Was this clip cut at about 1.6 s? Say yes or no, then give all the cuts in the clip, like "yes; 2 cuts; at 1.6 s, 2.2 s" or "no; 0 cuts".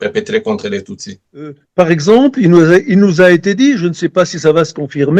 yes; 1 cut; at 1.6 s